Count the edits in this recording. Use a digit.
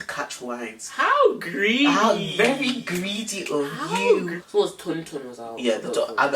1